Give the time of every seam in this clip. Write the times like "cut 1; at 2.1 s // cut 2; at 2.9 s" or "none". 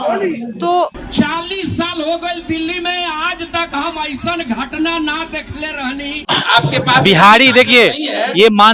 cut 1; at 1.0 s // cut 2; at 6.2 s